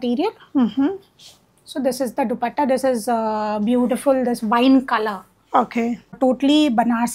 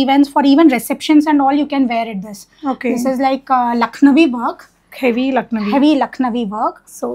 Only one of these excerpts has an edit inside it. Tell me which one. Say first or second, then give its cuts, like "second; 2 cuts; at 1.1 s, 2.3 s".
first; 1 cut; at 6.2 s